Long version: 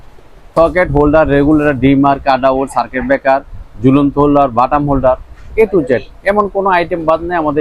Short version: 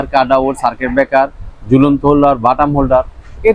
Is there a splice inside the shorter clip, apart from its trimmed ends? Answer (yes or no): no